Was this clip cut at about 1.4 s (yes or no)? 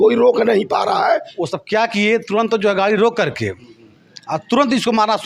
yes